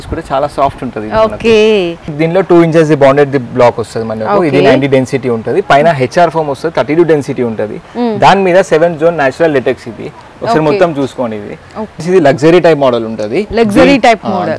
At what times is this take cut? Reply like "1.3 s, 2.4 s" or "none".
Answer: 2.2 s, 12.0 s